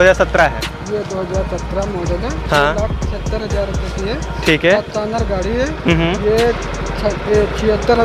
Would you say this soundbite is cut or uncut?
uncut